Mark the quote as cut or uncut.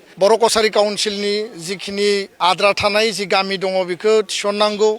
cut